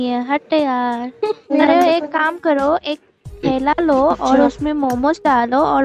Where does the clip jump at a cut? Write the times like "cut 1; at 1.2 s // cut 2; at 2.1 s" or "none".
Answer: cut 1; at 1.5 s